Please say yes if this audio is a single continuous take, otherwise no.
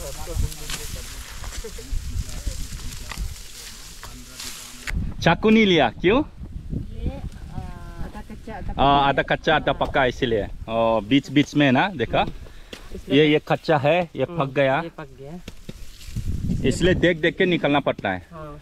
no